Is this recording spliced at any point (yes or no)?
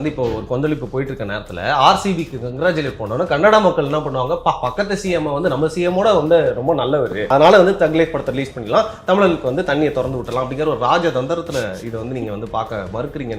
yes